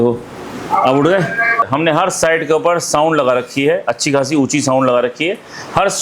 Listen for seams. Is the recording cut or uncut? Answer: cut